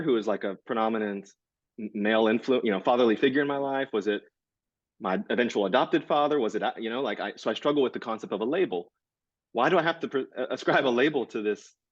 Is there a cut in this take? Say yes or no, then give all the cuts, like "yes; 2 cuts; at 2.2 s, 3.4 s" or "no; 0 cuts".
no; 0 cuts